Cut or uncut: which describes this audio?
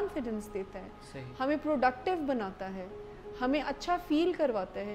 uncut